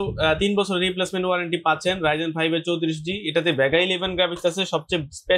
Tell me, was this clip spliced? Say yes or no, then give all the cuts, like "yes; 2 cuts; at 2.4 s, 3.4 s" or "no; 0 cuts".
no; 0 cuts